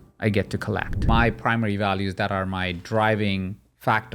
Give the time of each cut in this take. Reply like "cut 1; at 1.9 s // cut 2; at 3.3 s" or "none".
cut 1; at 1.0 s